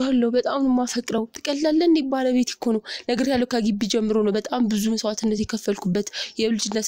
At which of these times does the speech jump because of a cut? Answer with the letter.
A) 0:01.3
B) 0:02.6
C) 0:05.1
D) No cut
D